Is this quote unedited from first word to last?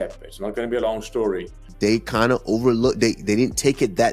no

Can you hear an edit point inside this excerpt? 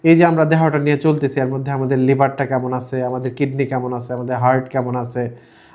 no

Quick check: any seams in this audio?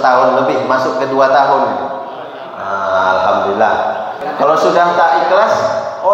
yes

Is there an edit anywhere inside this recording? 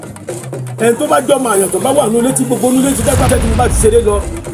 yes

